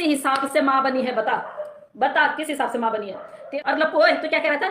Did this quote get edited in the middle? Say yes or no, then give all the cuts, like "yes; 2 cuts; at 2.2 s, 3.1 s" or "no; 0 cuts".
yes; 1 cut; at 3.5 s